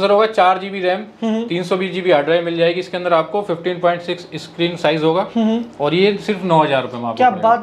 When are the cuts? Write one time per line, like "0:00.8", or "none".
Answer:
none